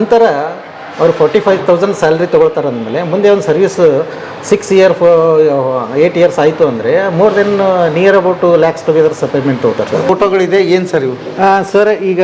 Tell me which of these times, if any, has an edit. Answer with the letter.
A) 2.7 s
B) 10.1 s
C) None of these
B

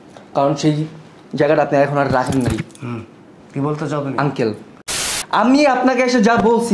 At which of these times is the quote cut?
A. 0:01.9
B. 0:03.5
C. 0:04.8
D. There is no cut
C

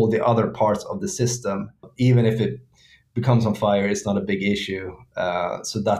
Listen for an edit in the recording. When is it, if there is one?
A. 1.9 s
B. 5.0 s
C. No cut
A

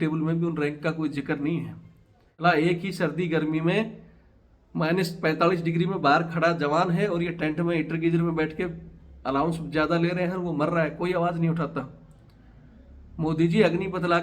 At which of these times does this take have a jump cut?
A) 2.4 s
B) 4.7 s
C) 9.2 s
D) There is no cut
A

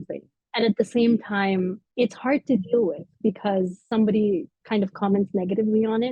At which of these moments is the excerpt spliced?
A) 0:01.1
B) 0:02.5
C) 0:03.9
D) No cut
C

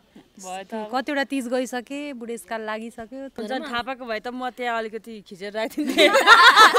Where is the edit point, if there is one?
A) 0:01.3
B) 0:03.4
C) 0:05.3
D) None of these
B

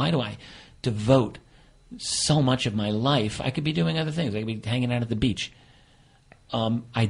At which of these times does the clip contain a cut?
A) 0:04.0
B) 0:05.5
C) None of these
A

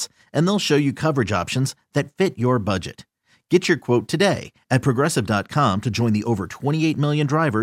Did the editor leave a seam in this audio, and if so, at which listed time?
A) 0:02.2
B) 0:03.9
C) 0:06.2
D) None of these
D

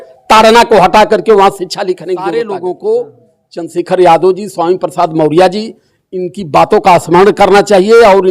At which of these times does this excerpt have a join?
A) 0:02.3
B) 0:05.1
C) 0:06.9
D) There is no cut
A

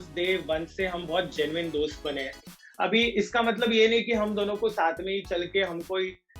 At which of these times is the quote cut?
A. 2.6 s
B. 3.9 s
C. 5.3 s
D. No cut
A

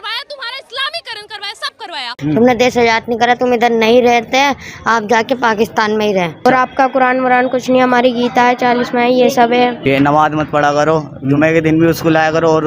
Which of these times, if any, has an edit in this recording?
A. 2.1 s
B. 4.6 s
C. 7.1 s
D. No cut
A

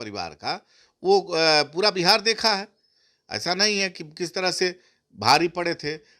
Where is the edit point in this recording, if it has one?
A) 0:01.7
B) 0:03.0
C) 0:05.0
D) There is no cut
D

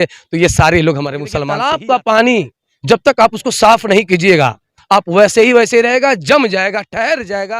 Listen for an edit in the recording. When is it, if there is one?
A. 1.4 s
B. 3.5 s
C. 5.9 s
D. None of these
A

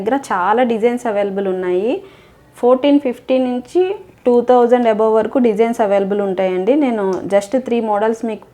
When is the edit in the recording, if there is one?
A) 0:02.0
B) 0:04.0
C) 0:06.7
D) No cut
D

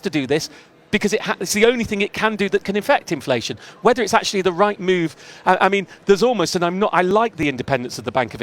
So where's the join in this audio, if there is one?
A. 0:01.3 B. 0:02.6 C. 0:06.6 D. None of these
D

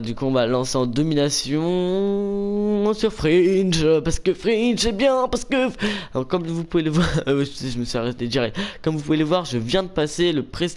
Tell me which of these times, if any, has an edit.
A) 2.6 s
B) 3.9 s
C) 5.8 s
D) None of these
D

